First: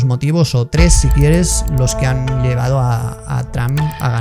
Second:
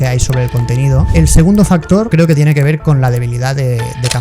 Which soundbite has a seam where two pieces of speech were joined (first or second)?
second